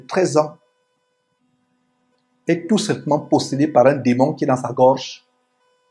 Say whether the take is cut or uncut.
uncut